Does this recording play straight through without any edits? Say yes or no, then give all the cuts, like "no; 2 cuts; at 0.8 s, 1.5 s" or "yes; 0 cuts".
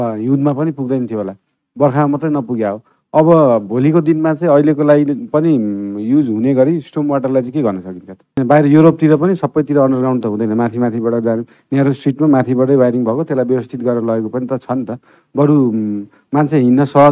no; 1 cut; at 8.4 s